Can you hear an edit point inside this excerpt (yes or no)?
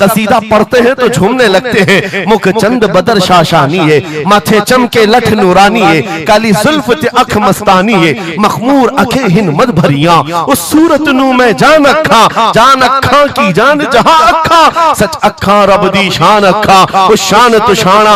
no